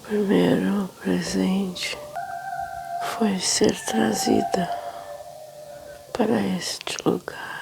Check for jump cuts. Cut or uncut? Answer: cut